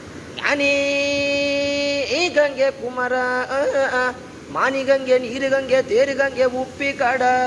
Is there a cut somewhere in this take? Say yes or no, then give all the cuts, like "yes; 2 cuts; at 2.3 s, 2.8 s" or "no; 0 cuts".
no; 0 cuts